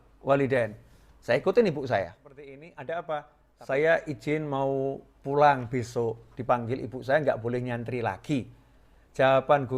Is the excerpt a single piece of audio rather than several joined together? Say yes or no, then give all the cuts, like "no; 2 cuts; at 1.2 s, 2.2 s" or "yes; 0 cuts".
no; 1 cut; at 2.6 s